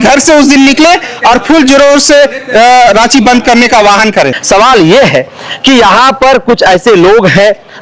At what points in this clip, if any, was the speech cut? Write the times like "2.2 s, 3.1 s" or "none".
4.4 s